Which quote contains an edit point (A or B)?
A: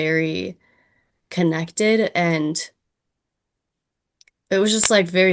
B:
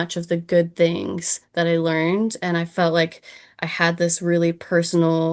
A